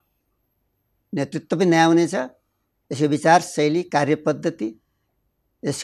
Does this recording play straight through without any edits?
yes; 0 cuts

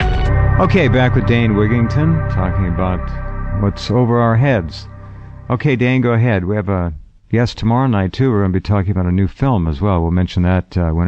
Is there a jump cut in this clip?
yes; 1 cut; at 1.0 s

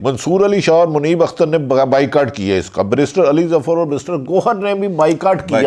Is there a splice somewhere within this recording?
no; 0 cuts

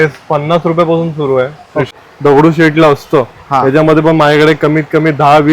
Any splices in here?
yes; 1 cut; at 1.9 s

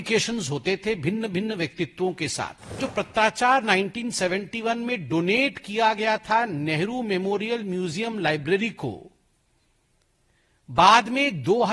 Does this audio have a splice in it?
yes; 1 cut; at 2.8 s

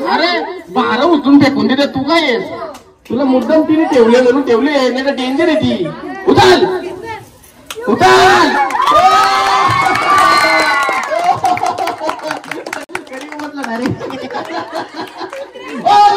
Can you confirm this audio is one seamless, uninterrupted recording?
yes; 0 cuts

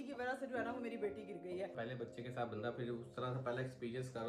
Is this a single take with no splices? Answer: no; 1 cut; at 1.7 s

